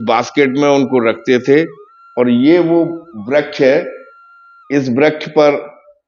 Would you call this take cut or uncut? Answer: uncut